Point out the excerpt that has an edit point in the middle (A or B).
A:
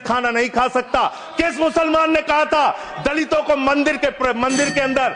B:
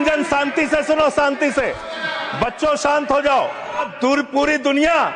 B